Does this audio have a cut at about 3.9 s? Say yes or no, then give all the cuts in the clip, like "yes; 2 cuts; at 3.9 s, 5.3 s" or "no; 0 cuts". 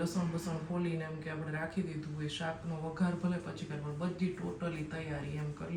no; 0 cuts